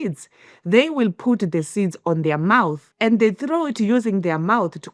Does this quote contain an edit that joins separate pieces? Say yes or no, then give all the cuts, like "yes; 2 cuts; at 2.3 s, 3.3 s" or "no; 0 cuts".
yes; 1 cut; at 2.8 s